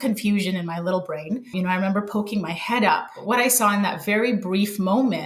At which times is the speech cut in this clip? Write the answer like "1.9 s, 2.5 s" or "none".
1.5 s, 3.1 s